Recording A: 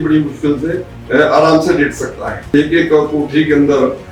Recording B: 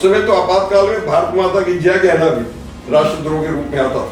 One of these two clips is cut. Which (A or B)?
A